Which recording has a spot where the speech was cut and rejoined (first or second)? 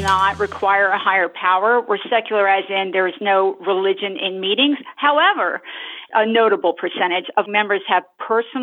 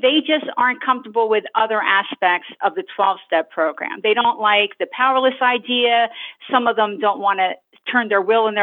first